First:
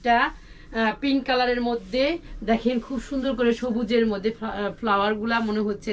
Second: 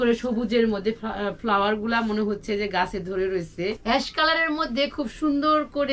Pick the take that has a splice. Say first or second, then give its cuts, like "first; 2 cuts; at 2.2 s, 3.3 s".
second; 1 cut; at 3.8 s